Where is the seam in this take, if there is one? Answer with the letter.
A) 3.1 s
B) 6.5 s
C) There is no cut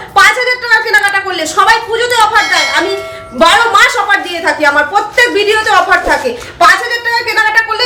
C